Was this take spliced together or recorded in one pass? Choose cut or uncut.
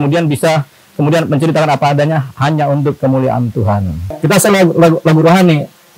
cut